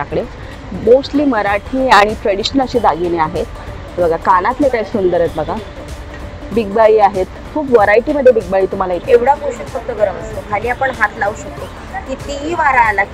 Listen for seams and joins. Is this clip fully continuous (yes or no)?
no